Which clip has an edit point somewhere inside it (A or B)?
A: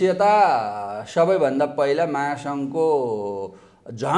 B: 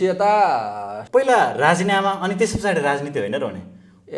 B